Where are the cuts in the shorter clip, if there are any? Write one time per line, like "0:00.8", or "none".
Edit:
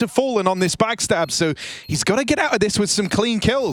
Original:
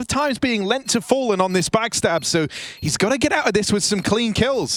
none